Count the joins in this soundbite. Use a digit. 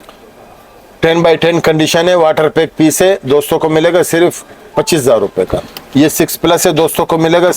1